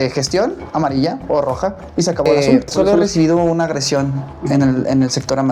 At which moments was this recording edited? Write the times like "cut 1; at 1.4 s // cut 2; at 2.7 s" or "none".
cut 1; at 2.7 s